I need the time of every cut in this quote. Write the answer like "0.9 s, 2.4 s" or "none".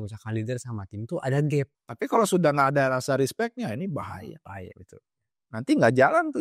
1.8 s